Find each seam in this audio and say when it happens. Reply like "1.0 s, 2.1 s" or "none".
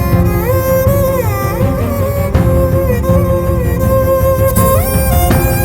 none